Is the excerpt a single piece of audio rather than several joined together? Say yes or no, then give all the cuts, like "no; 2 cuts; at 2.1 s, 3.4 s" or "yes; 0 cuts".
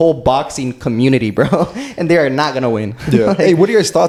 yes; 0 cuts